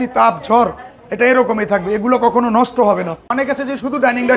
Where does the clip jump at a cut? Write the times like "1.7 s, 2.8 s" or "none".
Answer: 3.2 s